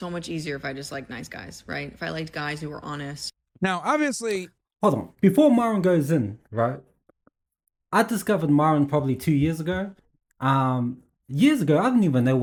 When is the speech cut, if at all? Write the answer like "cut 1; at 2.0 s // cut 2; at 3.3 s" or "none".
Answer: none